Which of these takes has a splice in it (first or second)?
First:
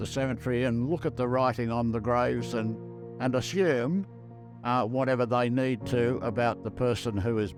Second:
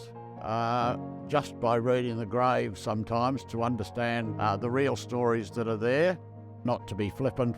second